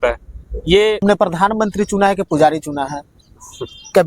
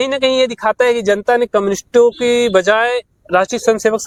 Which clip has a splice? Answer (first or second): first